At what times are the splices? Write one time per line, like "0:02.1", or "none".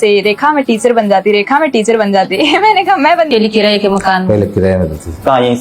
0:03.3